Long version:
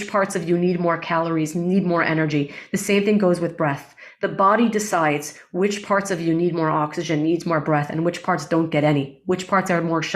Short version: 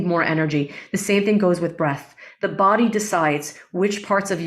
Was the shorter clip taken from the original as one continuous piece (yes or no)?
yes